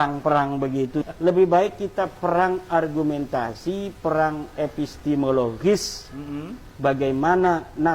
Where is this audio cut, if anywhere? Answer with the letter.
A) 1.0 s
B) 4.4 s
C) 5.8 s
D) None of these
A